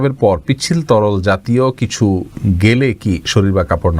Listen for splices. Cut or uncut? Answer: uncut